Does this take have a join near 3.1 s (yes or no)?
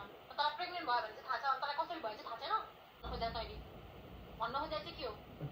yes